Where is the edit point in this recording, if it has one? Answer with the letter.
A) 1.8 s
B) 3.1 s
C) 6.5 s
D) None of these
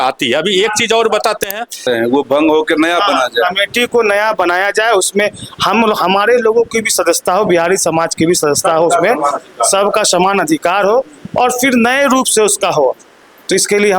A